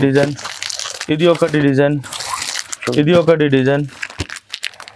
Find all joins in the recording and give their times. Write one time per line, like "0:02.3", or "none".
none